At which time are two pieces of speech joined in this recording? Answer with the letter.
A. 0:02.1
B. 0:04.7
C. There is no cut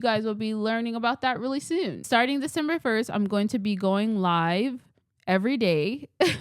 A